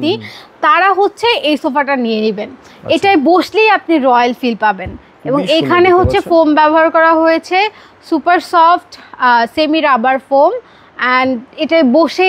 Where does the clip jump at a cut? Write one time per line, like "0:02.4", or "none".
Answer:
none